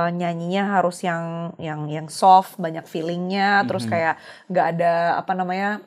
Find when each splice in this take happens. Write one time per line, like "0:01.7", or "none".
none